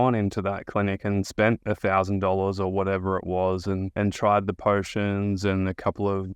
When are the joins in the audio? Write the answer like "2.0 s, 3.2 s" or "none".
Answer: 3.9 s